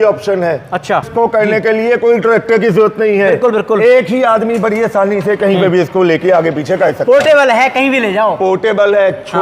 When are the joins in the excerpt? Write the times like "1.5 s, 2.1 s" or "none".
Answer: 1.1 s

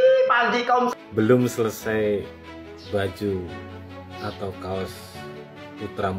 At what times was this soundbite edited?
1.0 s

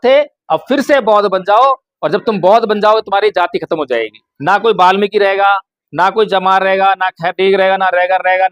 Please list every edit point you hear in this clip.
4.2 s

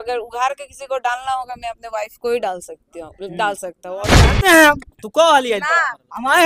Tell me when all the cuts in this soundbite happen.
4.2 s

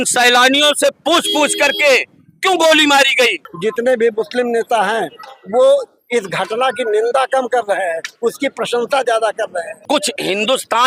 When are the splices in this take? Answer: 3.5 s, 9.8 s

